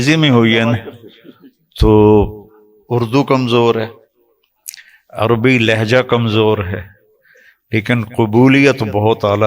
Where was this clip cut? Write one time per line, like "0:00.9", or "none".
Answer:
none